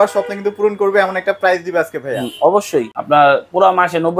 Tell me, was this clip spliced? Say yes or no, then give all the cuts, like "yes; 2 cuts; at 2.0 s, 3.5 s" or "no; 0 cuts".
yes; 1 cut; at 2.9 s